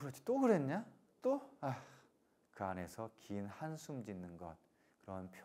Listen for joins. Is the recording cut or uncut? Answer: cut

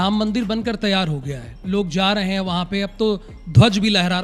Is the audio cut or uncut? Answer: uncut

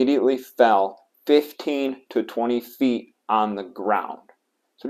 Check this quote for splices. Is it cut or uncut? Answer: uncut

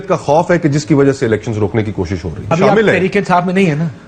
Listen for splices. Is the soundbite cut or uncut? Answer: cut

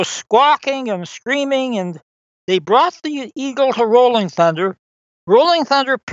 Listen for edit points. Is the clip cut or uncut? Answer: uncut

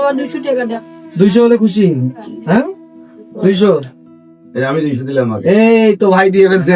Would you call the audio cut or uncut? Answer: uncut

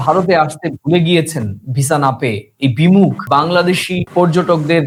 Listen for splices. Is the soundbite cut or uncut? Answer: uncut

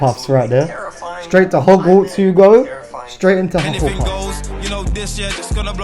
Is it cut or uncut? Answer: cut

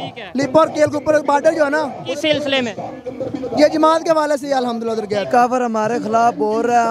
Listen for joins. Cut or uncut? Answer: cut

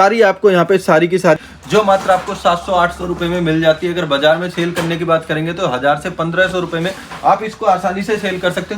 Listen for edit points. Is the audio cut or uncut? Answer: cut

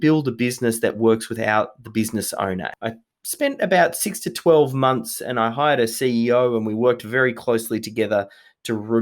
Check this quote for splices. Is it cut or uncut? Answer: cut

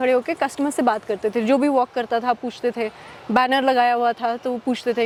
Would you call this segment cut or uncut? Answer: uncut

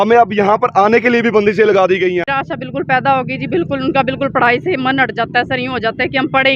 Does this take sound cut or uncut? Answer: cut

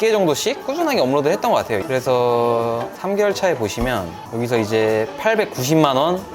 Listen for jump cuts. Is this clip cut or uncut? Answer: uncut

